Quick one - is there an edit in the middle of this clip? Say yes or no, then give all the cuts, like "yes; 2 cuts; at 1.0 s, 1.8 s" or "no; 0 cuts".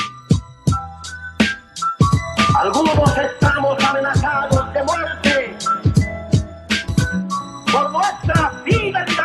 no; 0 cuts